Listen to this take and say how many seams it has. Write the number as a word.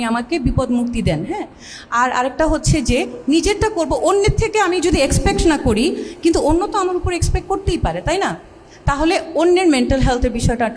zero